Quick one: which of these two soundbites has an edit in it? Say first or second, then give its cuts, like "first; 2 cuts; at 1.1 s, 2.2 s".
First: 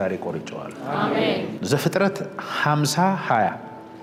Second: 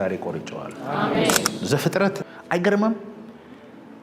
second; 1 cut; at 2.3 s